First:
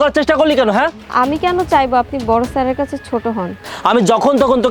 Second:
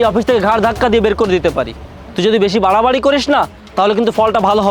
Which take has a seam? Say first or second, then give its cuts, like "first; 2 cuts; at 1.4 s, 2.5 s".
first; 2 cuts; at 0.9 s, 3.6 s